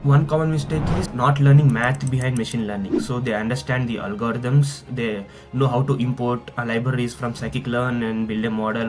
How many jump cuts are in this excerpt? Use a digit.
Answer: 1